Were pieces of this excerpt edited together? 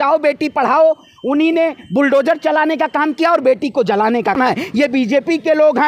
yes; 1 cut; at 4.4 s

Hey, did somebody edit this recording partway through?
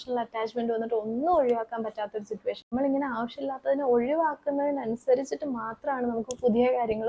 yes; 1 cut; at 2.7 s

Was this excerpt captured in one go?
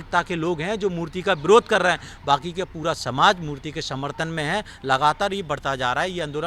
yes; 0 cuts

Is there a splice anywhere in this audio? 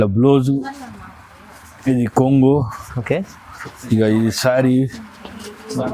no; 0 cuts

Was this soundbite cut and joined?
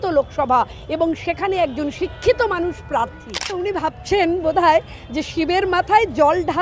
yes; 1 cut; at 3.6 s

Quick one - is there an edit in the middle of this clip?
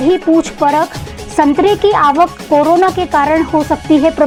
no; 0 cuts

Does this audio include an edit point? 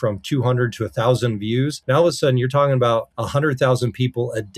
yes; 2 cuts; at 1.8 s, 3.2 s

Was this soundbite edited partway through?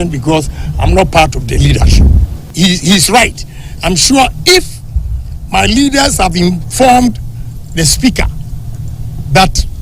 yes; 1 cut; at 2.5 s

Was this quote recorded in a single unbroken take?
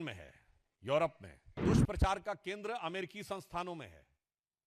no; 1 cut; at 1.6 s

